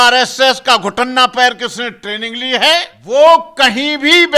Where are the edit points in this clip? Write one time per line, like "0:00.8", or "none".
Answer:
0:02.9